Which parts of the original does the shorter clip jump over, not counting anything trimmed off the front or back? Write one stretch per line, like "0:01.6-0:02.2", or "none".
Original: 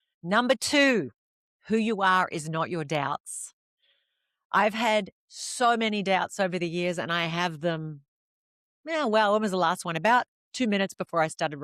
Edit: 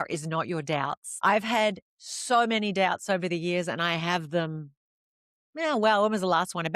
0:03.3-0:04.3